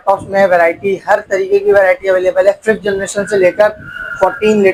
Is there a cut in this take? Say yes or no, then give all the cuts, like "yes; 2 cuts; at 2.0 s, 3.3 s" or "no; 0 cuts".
no; 0 cuts